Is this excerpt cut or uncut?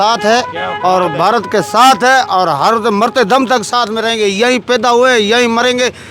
uncut